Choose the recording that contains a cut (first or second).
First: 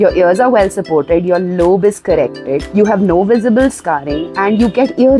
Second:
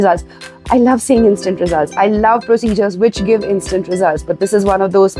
first